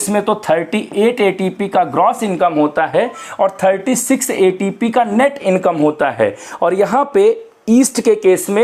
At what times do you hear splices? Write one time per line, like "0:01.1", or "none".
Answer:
none

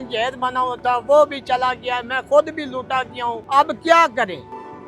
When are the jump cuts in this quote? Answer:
0:03.4

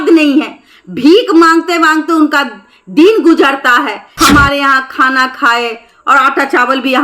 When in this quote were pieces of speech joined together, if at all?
0:04.0

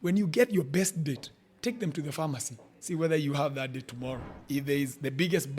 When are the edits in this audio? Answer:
0:04.3

